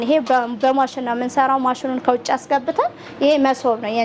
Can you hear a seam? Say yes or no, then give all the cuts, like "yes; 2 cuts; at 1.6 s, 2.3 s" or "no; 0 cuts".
no; 0 cuts